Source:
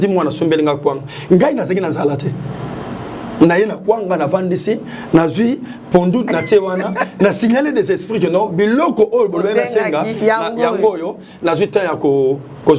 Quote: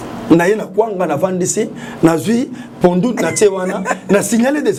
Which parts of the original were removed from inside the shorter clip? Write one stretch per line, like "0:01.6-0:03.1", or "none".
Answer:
none